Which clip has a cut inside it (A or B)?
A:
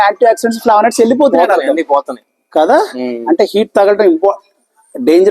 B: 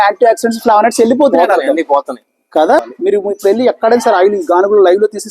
B